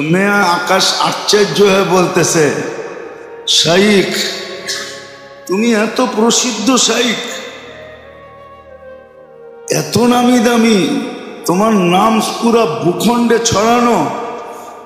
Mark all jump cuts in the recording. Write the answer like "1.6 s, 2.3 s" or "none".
7.6 s, 9.7 s